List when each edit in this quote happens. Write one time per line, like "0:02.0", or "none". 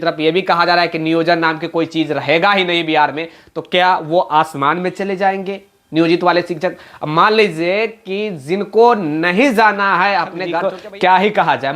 0:10.5